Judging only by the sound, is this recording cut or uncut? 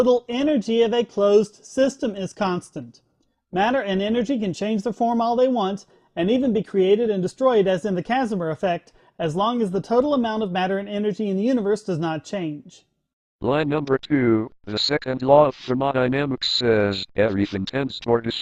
uncut